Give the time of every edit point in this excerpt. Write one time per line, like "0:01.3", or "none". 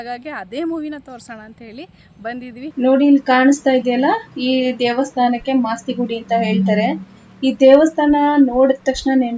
0:02.7